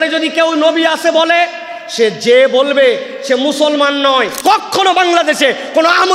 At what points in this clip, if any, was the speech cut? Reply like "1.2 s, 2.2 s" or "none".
4.4 s